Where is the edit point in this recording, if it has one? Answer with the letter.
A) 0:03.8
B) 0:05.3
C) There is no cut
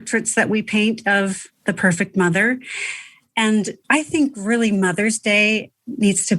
A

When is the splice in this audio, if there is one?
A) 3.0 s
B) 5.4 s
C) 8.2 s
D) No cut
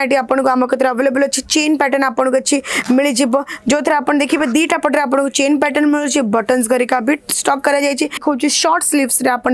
C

